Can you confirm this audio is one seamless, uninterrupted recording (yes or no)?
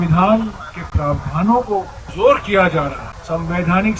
no